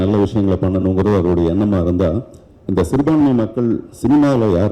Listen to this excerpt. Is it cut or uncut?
uncut